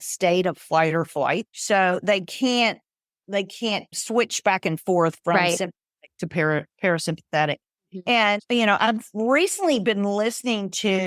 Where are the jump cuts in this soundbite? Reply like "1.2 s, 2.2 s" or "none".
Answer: 1.5 s, 3.9 s